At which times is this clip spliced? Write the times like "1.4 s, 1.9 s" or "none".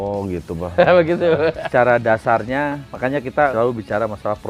1.6 s, 3.4 s

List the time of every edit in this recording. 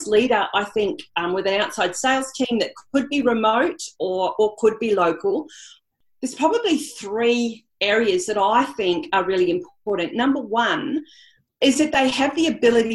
none

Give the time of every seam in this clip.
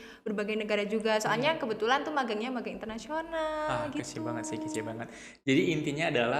none

